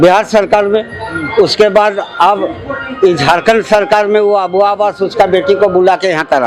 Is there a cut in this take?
no; 0 cuts

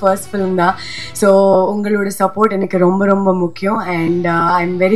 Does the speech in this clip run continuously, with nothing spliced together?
yes; 0 cuts

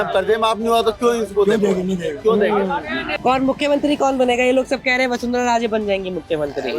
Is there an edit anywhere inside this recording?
yes; 1 cut; at 3.1 s

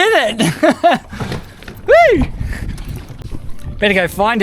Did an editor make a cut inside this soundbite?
yes; 1 cut; at 3.3 s

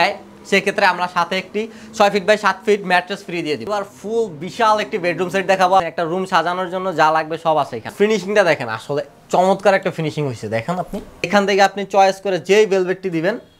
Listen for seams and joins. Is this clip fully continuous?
no; 4 cuts; at 3.6 s, 5.8 s, 7.9 s, 11.3 s

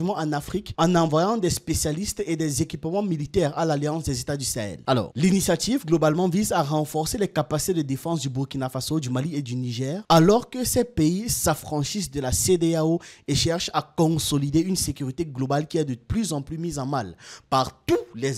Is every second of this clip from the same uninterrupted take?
yes; 0 cuts

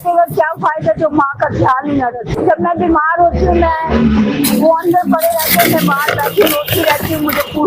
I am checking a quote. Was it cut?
no; 0 cuts

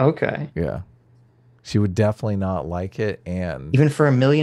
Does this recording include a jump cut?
no; 0 cuts

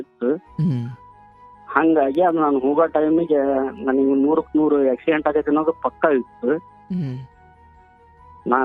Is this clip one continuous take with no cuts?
yes; 0 cuts

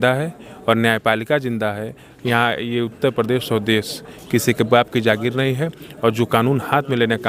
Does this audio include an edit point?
no; 0 cuts

